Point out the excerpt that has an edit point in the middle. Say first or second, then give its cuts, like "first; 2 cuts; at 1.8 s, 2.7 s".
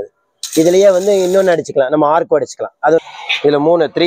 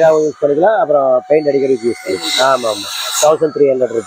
first; 1 cut; at 3.0 s